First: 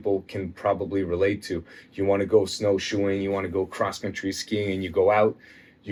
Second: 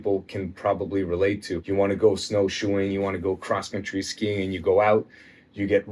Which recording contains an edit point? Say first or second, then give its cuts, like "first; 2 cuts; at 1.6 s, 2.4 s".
second; 1 cut; at 1.5 s